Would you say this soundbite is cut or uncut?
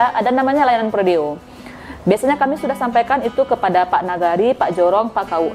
uncut